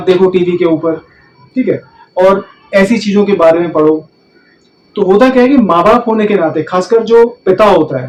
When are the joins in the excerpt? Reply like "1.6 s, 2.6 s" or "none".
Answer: none